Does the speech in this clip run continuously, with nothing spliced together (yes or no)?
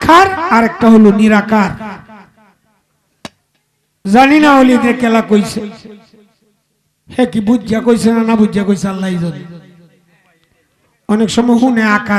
yes